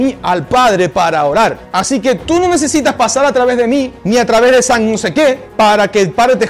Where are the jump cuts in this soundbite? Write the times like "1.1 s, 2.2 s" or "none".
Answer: 1.6 s, 3.9 s, 5.4 s